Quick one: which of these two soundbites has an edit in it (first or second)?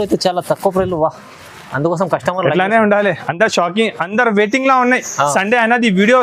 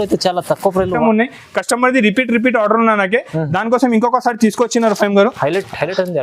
second